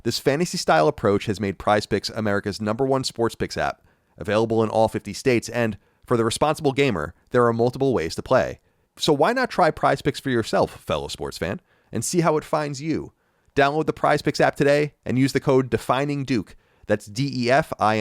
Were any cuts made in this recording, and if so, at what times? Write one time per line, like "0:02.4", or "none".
0:08.9